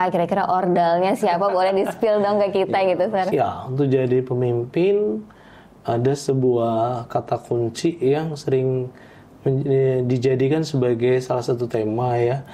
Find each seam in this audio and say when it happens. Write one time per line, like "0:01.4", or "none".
0:03.2

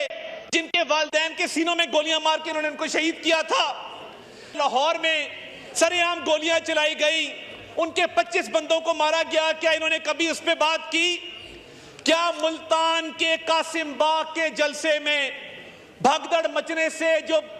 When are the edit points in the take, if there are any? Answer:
none

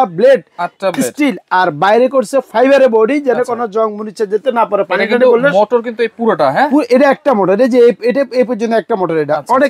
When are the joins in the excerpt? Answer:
none

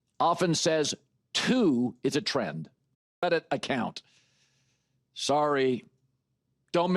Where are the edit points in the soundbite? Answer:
0:03.2

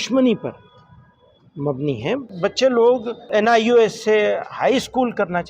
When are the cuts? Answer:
0:02.3
0:03.3

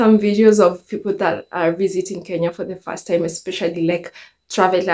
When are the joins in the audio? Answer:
none

